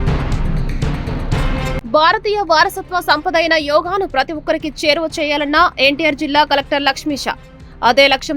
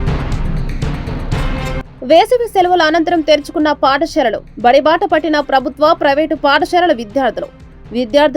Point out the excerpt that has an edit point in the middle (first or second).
first